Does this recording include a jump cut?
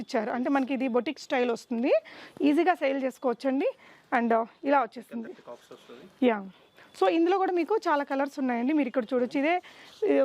no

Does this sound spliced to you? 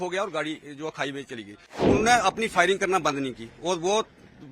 yes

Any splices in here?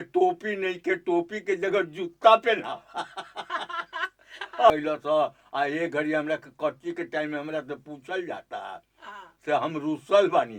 yes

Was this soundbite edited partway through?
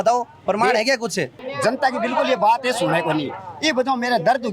yes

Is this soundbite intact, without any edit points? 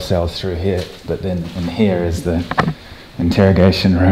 yes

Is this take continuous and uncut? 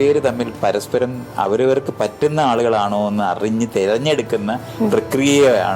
yes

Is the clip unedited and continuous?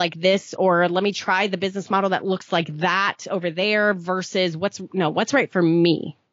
yes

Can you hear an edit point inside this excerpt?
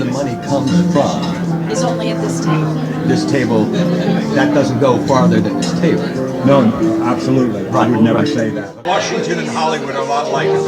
yes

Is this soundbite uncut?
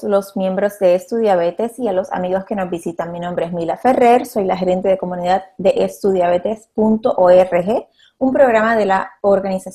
yes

